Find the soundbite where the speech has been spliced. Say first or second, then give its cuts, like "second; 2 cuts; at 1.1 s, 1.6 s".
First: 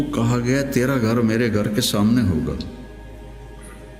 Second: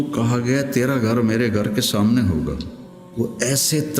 second; 1 cut; at 3.0 s